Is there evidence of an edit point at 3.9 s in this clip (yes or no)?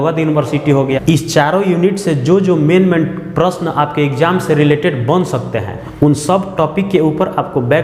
no